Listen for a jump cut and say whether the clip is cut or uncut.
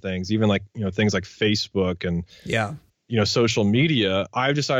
uncut